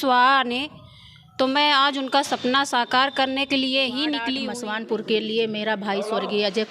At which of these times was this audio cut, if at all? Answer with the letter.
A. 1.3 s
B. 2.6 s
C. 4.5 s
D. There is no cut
C